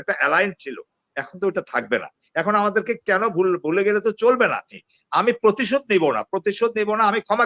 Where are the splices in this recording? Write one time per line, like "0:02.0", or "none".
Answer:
0:04.8